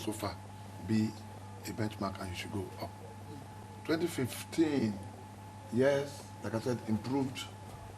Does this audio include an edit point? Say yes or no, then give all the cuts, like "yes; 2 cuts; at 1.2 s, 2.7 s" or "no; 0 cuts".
yes; 1 cut; at 3.6 s